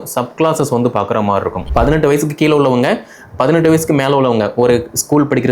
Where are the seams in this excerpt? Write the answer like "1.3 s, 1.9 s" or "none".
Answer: 1.7 s